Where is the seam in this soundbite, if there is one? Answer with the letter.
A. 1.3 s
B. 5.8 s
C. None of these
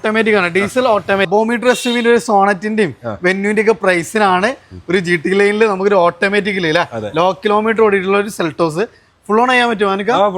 A